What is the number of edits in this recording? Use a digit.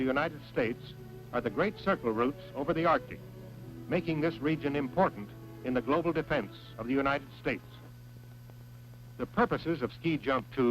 1